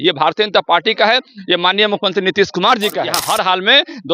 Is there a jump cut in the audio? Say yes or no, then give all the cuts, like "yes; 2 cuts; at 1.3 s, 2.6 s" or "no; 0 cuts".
yes; 1 cut; at 3.1 s